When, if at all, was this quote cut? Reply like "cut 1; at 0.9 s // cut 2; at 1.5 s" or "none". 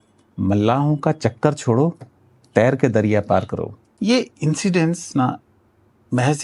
cut 1; at 3.8 s

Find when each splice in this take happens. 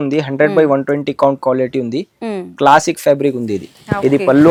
none

